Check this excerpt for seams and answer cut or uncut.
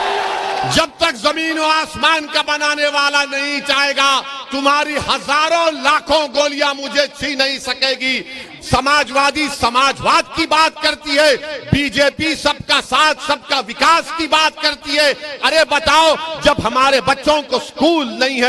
cut